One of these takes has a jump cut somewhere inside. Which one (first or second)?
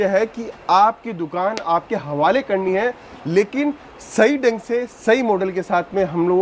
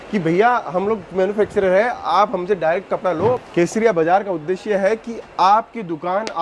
second